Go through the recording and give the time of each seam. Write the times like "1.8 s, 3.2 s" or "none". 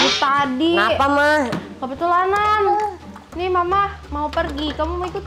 none